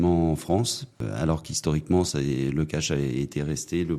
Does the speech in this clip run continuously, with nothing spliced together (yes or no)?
no